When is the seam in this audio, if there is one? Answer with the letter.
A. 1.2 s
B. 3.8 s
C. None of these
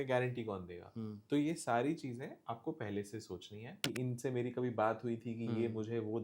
B